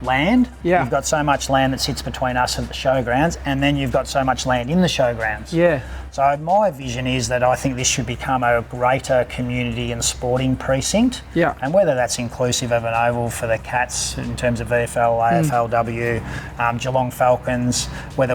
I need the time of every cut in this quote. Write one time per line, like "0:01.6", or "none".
none